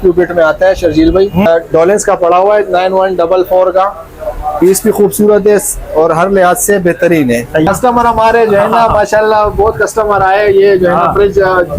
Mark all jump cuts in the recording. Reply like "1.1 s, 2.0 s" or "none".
1.5 s, 7.7 s